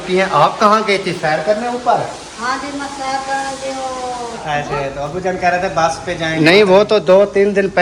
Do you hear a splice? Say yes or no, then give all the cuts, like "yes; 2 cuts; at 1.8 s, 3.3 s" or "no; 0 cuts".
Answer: yes; 1 cut; at 4.4 s